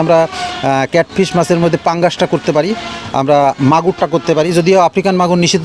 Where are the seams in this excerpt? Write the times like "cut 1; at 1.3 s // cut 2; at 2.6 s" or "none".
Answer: none